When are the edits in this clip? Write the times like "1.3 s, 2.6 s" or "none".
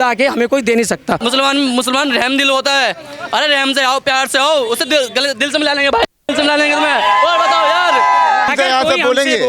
1.2 s, 8.5 s